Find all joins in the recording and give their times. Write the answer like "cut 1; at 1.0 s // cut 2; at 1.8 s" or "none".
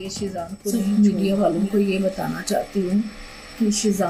cut 1; at 1.0 s